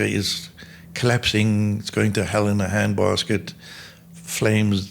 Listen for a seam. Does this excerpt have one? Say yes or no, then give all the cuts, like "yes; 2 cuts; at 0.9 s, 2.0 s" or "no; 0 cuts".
no; 0 cuts